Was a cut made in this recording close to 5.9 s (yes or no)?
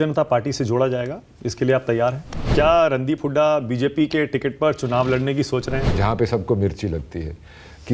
yes